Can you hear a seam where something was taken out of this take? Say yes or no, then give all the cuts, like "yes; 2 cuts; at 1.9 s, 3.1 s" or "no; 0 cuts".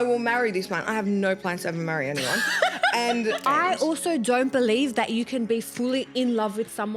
yes; 1 cut; at 3.4 s